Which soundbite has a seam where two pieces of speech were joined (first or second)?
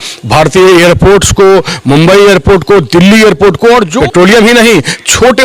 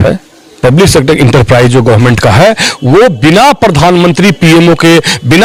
first